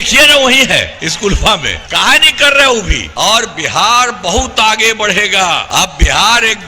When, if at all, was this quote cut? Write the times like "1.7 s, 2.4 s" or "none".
1.0 s, 1.8 s, 3.0 s, 5.7 s